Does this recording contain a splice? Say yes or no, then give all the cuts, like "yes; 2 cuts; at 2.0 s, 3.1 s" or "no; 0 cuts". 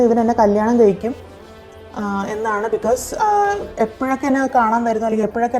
no; 0 cuts